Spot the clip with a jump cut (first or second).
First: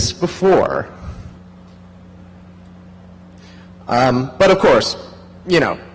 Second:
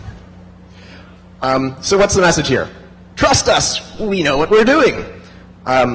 second